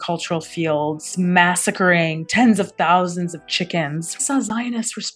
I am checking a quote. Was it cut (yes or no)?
yes